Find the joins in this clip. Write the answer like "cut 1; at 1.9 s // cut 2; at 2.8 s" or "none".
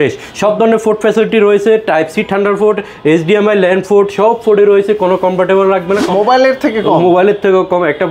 cut 1; at 6.1 s